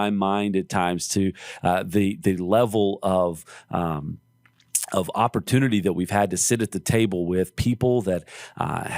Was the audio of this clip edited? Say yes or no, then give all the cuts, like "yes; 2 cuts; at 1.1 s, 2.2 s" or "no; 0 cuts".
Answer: no; 0 cuts